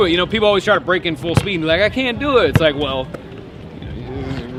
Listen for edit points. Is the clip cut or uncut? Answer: uncut